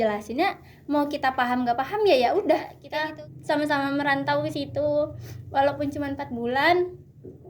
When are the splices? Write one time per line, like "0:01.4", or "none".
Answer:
0:02.8